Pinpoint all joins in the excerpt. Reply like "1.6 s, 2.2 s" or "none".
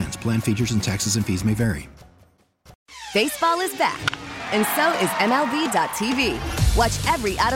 2.8 s